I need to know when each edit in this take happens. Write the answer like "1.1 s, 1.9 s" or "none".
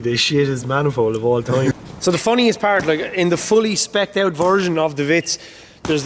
1.8 s